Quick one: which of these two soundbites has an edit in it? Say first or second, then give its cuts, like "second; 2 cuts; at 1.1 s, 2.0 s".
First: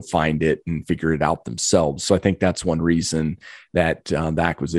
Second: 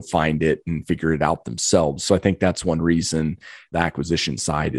second; 1 cut; at 3.7 s